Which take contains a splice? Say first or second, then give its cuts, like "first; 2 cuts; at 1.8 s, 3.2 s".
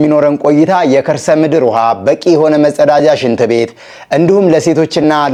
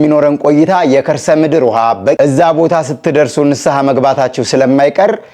second; 1 cut; at 2.2 s